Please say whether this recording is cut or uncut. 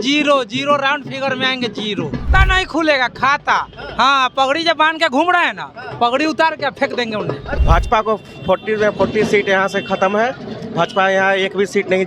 cut